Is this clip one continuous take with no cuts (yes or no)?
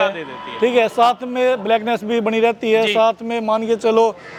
yes